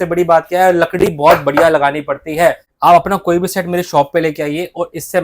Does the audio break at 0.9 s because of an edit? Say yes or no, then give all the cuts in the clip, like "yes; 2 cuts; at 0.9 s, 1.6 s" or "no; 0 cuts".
no; 1 cut; at 2.7 s